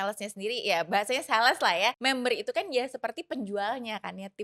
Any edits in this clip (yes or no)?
yes